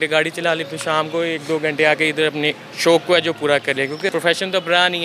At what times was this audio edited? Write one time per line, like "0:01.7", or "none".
0:04.1